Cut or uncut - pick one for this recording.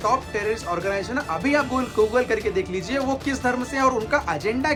uncut